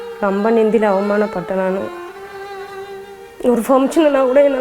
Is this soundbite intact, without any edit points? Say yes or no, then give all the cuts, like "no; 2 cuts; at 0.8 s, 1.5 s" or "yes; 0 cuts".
yes; 0 cuts